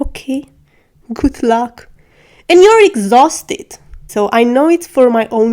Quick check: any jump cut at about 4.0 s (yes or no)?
yes